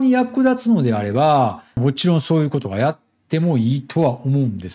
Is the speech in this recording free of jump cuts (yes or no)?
yes